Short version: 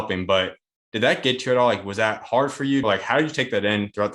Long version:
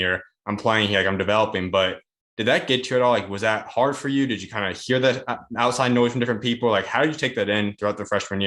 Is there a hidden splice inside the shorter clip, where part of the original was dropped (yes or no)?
yes